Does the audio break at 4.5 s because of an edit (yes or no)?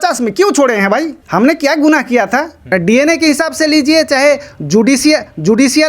no